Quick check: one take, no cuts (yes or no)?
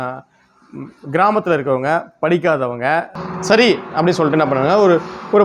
no